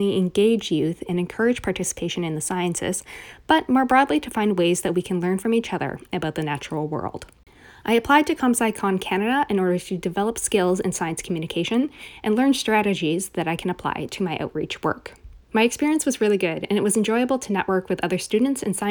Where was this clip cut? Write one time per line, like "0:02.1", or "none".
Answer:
none